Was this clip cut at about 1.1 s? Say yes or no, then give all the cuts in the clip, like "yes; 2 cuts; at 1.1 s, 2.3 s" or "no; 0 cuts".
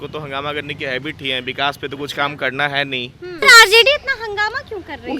no; 1 cut; at 3.4 s